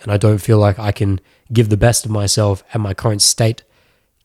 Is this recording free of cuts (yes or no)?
yes